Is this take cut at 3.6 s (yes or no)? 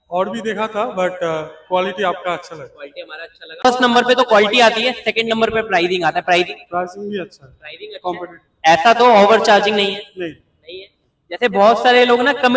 yes